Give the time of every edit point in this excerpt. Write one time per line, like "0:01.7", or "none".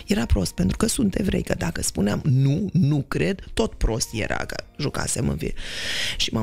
none